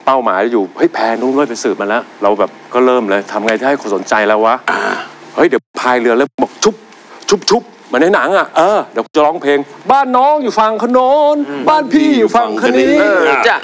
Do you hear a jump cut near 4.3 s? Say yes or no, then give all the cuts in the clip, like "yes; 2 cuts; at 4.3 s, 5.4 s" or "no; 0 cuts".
no; 1 cut; at 2.1 s